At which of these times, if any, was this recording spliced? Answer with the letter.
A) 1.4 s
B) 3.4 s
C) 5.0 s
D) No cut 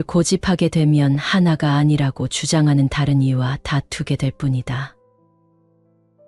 C